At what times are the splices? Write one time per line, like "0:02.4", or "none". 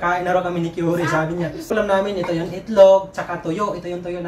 0:01.7